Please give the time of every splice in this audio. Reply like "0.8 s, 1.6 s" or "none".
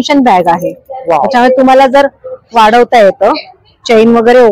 none